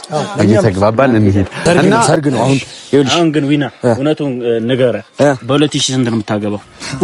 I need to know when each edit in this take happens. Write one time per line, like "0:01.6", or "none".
0:01.8